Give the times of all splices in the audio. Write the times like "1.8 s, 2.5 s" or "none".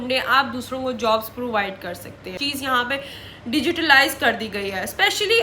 2.4 s

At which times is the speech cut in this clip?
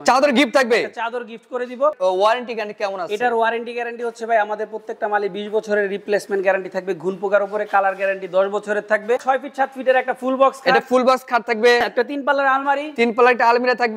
2.0 s, 9.2 s, 11.8 s

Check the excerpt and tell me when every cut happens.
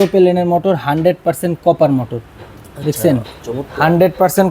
none

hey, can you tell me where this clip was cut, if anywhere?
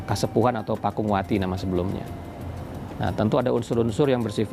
none

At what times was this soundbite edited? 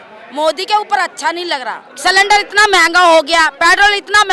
1.8 s

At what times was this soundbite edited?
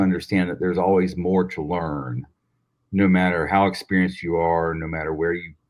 none

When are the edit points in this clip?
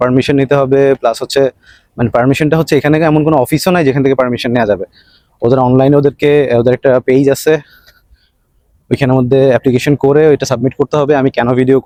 none

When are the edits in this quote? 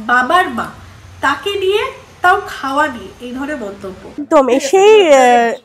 4.2 s

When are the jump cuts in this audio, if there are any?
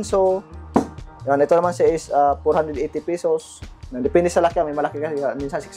none

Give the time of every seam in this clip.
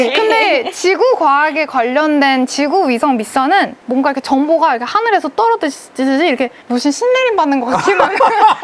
3.7 s, 6.6 s

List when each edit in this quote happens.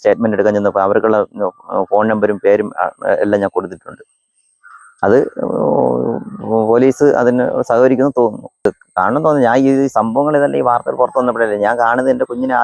8.6 s

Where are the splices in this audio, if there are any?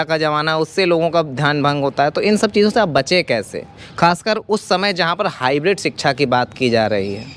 none

